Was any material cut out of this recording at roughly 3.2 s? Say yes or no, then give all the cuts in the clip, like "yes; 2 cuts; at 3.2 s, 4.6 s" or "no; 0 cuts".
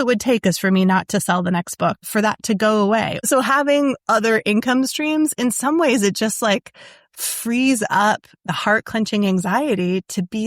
yes; 3 cuts; at 2.0 s, 3.2 s, 8.5 s